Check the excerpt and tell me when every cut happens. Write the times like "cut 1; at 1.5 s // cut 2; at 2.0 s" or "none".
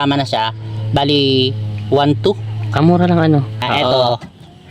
cut 1; at 3.8 s